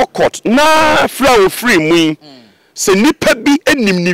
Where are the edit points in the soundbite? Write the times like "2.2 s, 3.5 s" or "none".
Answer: none